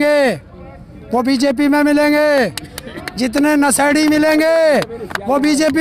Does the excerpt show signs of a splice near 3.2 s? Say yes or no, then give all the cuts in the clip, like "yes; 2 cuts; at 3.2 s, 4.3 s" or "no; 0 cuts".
no; 0 cuts